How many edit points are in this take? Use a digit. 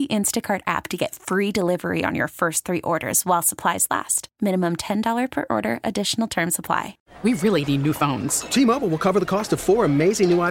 1